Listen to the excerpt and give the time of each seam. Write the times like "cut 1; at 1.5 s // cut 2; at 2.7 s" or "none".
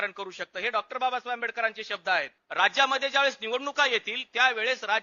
cut 1; at 2.4 s